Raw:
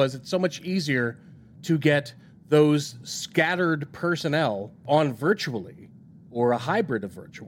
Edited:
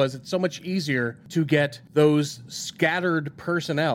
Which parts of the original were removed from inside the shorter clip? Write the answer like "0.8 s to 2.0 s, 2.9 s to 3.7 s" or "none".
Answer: 1.6 s to 2.1 s

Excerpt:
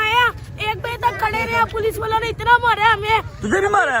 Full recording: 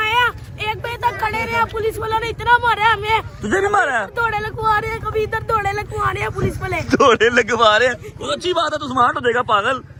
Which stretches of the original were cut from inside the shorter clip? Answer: none

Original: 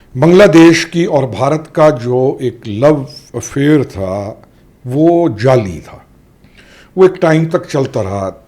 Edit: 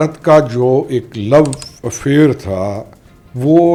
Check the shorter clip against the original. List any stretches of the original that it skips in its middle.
none

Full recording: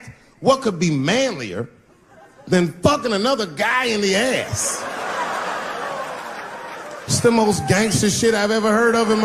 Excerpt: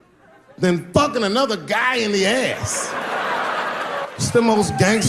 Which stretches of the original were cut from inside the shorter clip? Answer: 5.9 s to 7.0 s

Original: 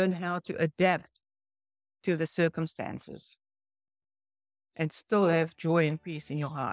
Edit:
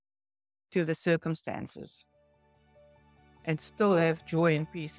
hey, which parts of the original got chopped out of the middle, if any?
none

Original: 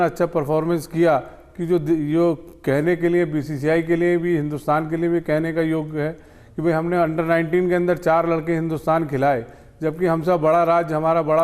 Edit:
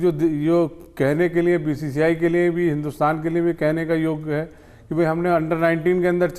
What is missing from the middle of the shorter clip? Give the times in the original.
none

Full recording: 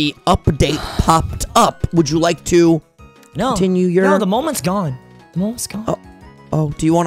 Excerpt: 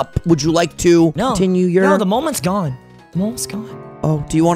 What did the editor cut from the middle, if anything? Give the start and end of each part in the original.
2.8 s to 3.4 s, 5.8 s to 6.1 s

